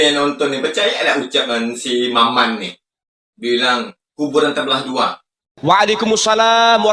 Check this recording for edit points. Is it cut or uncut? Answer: cut